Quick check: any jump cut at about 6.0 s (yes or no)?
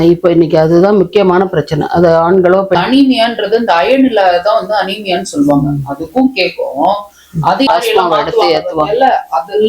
no